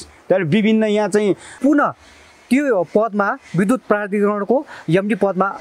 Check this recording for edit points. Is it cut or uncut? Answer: cut